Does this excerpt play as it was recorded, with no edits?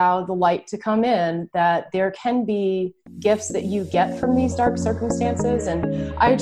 yes; 0 cuts

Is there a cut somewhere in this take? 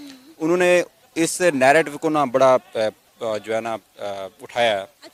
no; 0 cuts

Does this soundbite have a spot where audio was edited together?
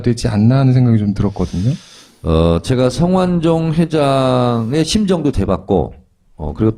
no; 0 cuts

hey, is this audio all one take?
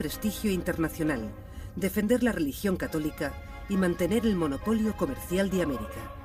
yes; 0 cuts

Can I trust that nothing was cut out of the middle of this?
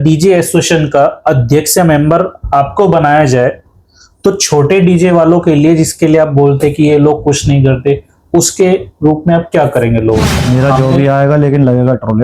no; 1 cut; at 10.4 s

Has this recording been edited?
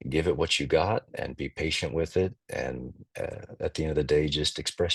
no; 0 cuts

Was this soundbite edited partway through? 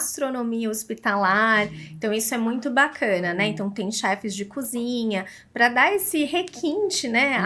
no; 0 cuts

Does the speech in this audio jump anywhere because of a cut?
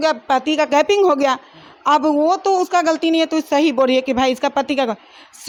no; 0 cuts

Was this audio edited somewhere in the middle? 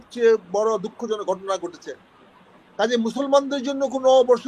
no; 0 cuts

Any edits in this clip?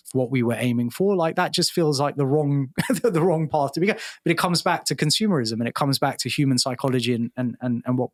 no; 0 cuts

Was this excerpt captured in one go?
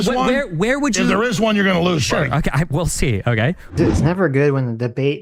no; 1 cut; at 3.8 s

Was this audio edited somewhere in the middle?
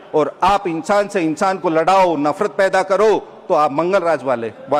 no; 0 cuts

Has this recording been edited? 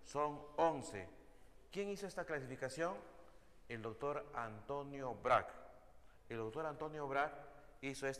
yes; 1 cut; at 2.9 s

